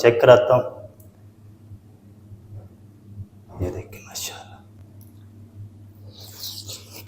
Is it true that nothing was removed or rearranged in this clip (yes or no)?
no